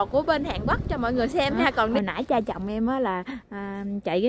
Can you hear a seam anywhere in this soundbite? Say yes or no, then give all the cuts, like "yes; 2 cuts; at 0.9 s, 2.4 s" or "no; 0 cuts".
yes; 1 cut; at 2.0 s